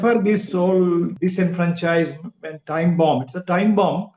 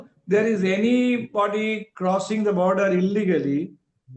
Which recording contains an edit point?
first; 1 cut; at 1.1 s

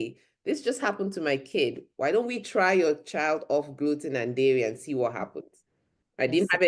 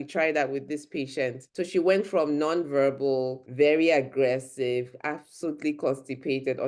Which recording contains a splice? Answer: second; 2 cuts; at 1.4 s, 3.4 s

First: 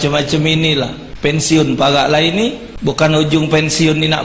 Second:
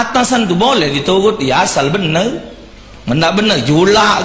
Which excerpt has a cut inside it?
first; 2 cuts; at 1.0 s, 2.7 s

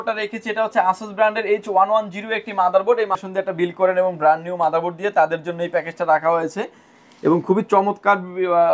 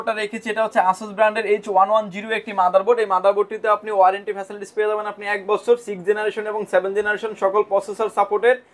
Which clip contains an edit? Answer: first; 1 cut; at 3.2 s

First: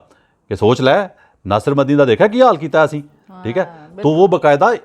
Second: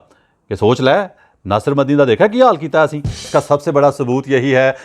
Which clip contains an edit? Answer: second; 1 cut; at 3.3 s

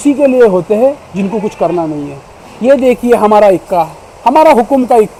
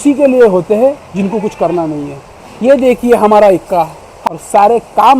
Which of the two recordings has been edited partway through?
second; 1 cut; at 4.1 s

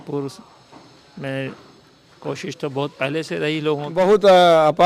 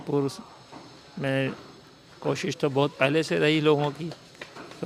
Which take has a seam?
first; 1 cut; at 3.9 s

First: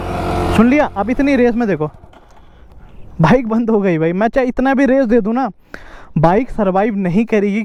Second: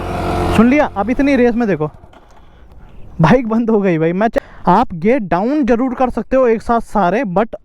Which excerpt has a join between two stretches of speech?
second; 1 cut; at 4.3 s

